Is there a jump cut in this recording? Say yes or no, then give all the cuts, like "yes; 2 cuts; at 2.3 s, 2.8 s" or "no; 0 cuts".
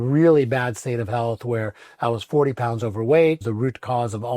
yes; 1 cut; at 3.4 s